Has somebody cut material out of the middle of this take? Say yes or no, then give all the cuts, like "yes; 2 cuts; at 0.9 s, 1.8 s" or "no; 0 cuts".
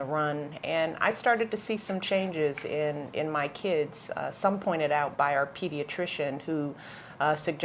yes; 1 cut; at 1.0 s